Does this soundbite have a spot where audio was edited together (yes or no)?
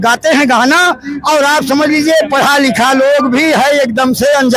no